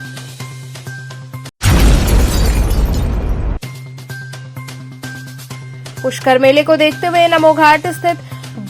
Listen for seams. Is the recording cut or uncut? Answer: cut